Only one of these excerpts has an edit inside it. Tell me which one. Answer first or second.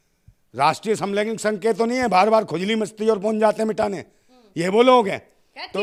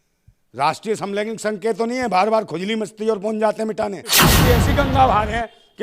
second